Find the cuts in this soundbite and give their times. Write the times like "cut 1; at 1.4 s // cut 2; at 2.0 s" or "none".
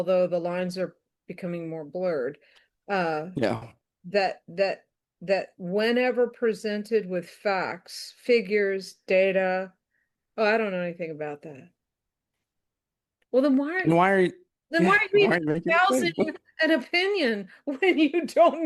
none